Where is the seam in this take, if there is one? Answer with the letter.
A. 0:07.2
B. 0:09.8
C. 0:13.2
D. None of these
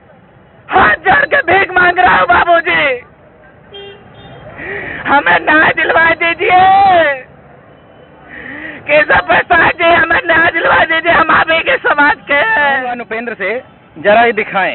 C